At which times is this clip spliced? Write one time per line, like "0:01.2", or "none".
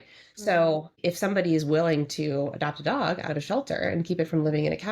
0:01.0

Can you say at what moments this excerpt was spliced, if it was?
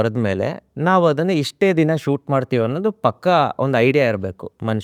none

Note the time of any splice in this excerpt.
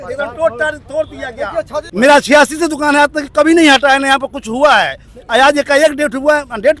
0:01.9

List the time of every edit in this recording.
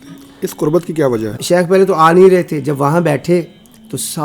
0:01.4

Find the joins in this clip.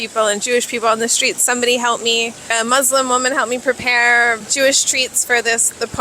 0:02.5
0:04.5

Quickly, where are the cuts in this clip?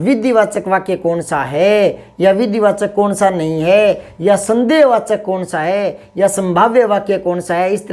none

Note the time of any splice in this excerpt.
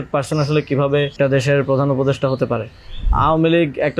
0:01.1
0:03.1

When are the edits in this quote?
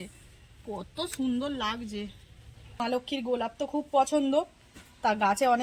0:02.8

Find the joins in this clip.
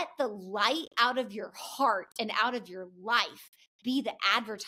none

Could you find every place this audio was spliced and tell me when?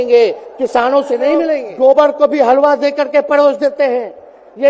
0:01.6

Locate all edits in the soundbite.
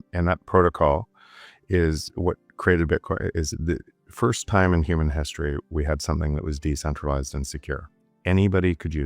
0:07.9

